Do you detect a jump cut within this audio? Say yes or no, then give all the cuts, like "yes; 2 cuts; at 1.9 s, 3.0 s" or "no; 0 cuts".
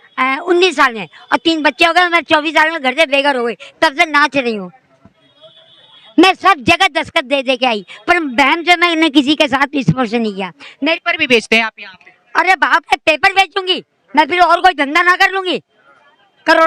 yes; 1 cut; at 11.0 s